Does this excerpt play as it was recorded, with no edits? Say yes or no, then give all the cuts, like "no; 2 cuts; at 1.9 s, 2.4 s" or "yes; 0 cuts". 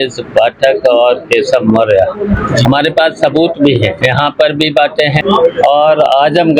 no; 3 cuts; at 2.6 s, 4.0 s, 5.2 s